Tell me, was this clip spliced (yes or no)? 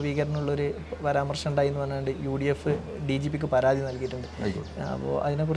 no